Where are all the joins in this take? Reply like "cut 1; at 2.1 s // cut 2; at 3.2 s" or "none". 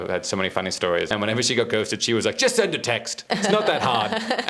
cut 1; at 1.1 s // cut 2; at 3.1 s